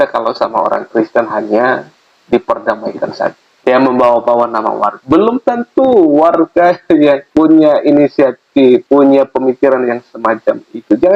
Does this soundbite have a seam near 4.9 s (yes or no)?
yes